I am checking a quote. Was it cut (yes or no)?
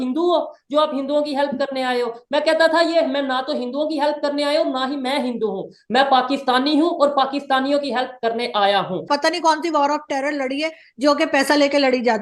yes